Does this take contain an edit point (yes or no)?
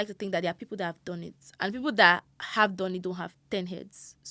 no